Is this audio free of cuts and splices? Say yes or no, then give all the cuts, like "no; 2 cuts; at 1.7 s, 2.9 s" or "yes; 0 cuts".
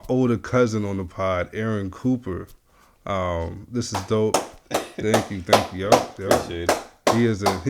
yes; 0 cuts